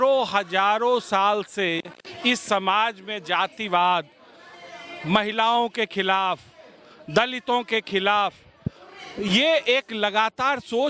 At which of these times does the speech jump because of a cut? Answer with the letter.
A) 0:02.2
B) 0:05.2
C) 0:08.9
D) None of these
D